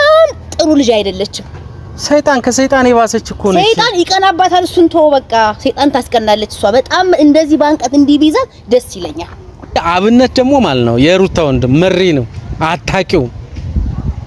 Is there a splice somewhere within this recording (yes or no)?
yes